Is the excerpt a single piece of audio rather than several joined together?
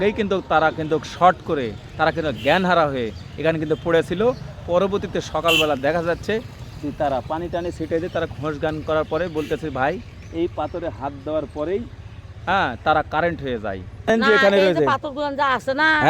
no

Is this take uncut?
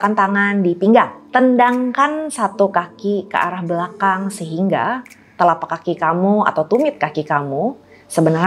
yes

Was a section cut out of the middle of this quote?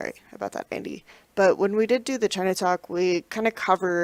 no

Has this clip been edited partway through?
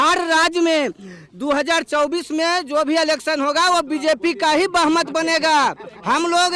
no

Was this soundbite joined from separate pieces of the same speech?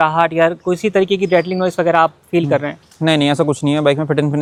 no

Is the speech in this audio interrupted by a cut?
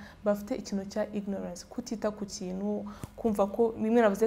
no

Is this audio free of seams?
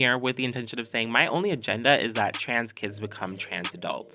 yes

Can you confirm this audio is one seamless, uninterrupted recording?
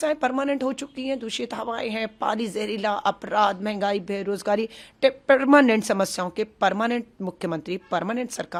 yes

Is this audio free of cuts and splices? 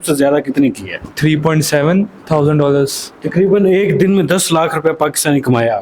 no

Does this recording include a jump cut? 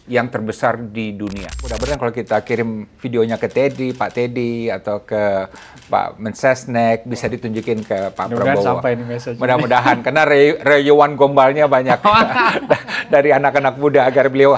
yes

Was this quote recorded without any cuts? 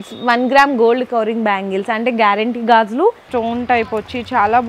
no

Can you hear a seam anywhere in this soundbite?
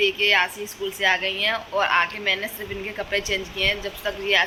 no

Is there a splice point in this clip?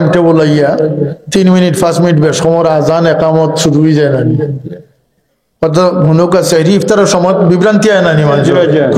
no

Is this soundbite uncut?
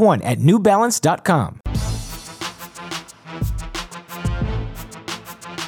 no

